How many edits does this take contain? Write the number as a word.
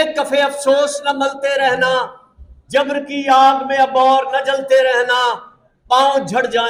zero